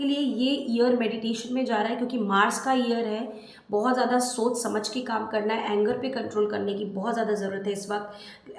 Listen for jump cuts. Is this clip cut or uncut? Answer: uncut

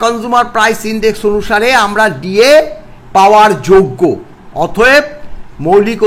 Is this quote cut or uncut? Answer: uncut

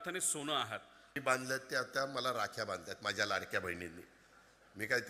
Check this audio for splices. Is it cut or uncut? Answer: cut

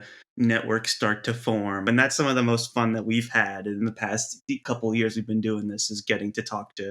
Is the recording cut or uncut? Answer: cut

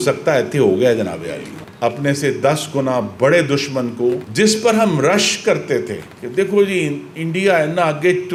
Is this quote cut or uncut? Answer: uncut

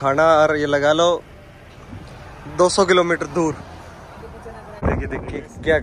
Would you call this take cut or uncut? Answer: cut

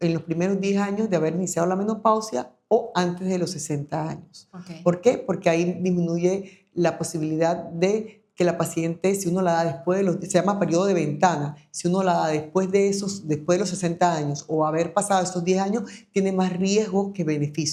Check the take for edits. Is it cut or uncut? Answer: uncut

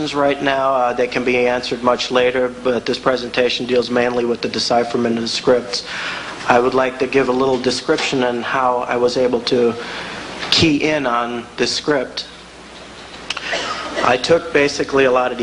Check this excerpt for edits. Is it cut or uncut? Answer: uncut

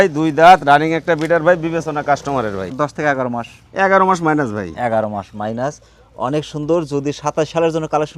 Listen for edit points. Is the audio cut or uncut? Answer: cut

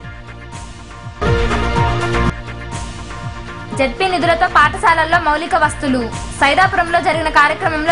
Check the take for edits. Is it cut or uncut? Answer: uncut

